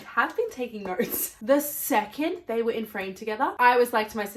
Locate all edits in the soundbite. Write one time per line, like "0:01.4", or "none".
0:01.4